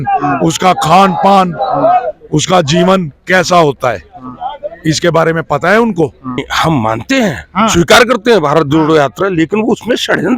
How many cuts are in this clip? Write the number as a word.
one